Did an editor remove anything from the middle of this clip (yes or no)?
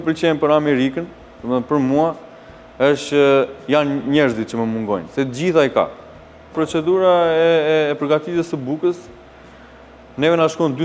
no